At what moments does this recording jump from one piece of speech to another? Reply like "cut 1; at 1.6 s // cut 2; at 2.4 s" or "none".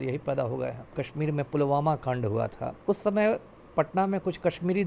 cut 1; at 1.0 s // cut 2; at 2.7 s

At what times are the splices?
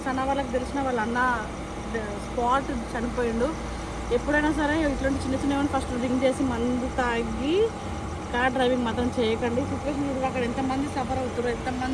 none

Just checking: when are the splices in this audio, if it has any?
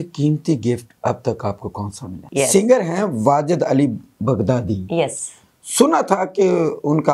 cut 1; at 2.3 s

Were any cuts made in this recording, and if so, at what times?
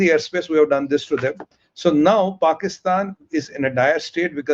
none

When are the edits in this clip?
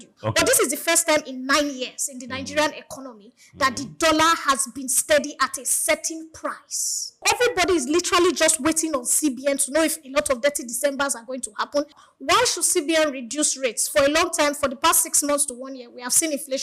cut 1; at 7.2 s // cut 2; at 12.0 s

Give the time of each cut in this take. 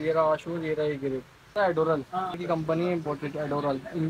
cut 1; at 1.5 s // cut 2; at 2.4 s

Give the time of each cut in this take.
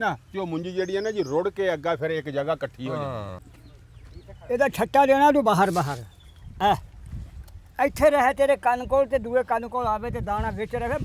cut 1; at 3.5 s

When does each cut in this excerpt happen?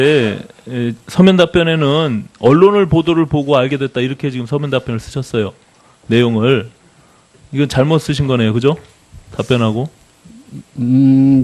none

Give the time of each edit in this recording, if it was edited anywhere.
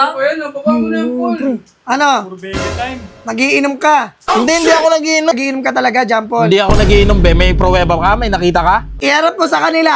cut 1; at 5.3 s // cut 2; at 9.0 s

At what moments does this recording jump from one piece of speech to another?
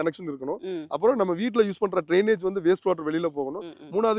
none

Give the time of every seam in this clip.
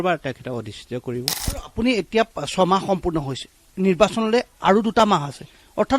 cut 1; at 1.4 s

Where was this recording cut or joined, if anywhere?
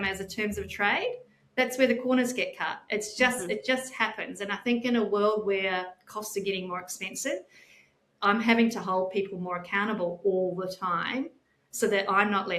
none

